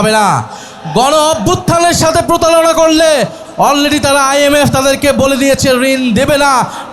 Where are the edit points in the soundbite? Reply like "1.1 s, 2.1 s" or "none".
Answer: 3.5 s